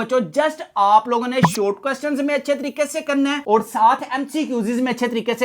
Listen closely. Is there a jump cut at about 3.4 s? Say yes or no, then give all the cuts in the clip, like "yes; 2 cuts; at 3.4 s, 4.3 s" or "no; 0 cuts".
no; 0 cuts